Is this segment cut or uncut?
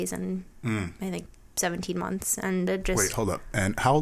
cut